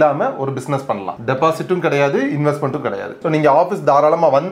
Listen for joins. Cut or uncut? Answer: cut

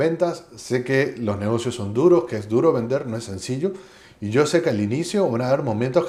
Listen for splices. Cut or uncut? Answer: uncut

